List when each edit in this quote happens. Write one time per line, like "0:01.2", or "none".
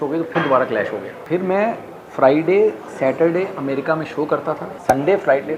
0:01.2
0:04.7

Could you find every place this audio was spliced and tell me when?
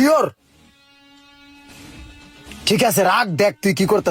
none

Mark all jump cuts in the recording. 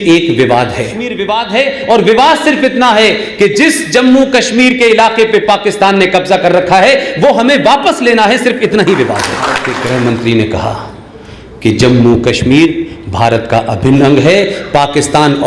0:01.2
0:09.7

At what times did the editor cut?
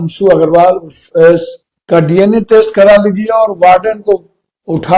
none

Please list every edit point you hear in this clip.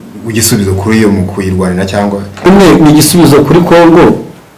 0:02.5

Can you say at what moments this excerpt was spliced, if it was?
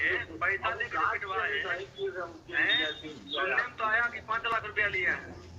none

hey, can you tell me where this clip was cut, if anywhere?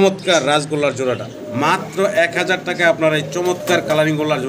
0:01.3

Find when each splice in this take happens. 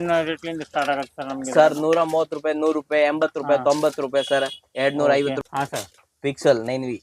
0:05.4

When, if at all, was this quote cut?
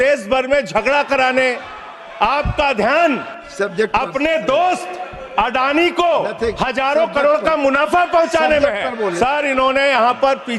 0:09.1

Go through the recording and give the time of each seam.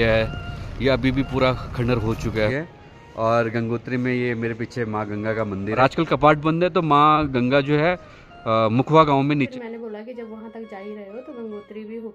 0:02.5
0:05.8
0:09.5

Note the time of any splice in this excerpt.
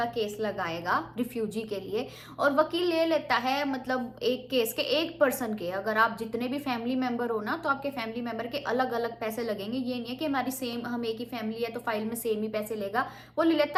none

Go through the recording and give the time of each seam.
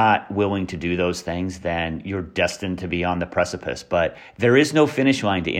0:04.2

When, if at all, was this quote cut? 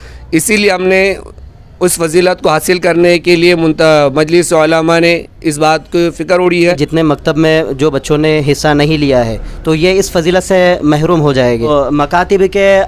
0:06.8
0:11.7

